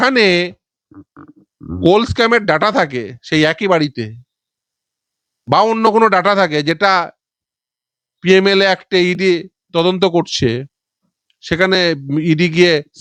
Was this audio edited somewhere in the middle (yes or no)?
no